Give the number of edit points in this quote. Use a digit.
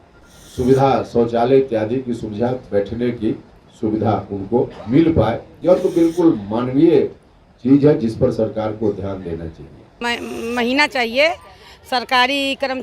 1